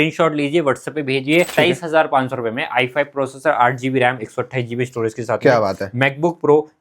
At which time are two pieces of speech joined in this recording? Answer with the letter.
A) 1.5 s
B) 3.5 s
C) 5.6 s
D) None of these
A